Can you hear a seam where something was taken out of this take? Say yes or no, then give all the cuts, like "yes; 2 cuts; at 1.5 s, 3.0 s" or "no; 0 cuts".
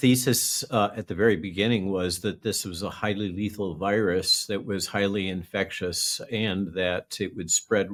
no; 0 cuts